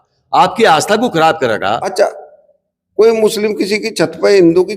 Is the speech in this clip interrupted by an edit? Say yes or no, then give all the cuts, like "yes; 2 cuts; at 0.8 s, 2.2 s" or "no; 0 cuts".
yes; 1 cut; at 1.9 s